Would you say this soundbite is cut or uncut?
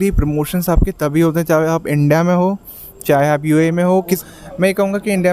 cut